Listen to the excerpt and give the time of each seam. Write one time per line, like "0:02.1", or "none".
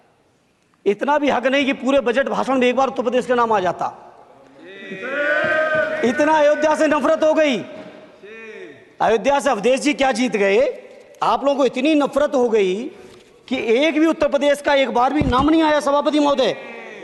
none